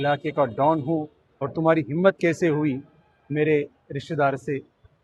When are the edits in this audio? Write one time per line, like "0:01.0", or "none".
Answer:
none